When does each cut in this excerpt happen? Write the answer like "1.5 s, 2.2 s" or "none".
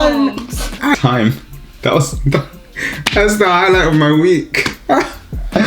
1.0 s

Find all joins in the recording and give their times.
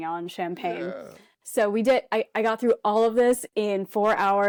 none

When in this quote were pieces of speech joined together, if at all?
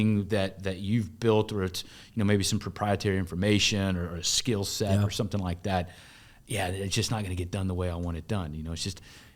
none

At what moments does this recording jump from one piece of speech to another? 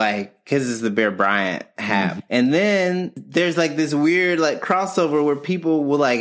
2.2 s, 3.2 s

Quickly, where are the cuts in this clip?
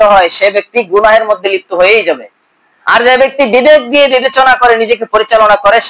none

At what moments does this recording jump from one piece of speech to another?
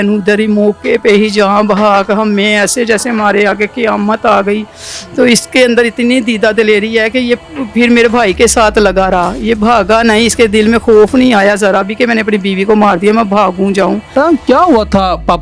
14.1 s

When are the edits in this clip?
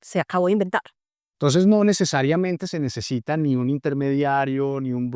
1.1 s

